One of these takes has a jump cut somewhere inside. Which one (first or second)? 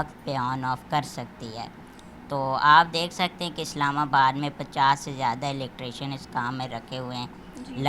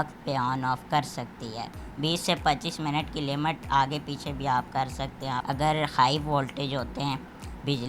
second